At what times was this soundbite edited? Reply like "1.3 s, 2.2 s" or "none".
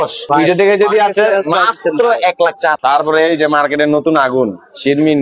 2.7 s